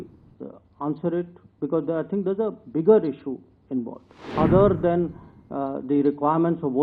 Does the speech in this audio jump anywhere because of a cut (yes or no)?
yes